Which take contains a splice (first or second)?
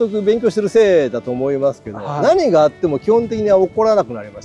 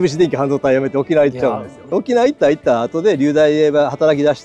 second